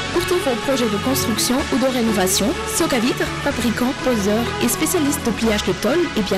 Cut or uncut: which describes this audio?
uncut